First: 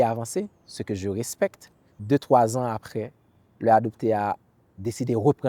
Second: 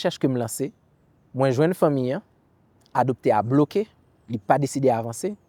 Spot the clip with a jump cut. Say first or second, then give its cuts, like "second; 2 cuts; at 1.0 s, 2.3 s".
first; 1 cut; at 2.0 s